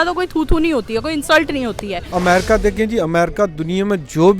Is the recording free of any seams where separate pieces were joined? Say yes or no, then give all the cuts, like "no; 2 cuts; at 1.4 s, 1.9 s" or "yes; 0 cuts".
no; 1 cut; at 2.0 s